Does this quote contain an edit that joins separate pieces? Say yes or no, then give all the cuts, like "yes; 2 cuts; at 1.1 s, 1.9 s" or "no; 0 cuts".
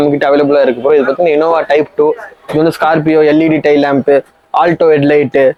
no; 0 cuts